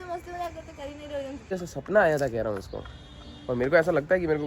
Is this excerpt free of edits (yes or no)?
no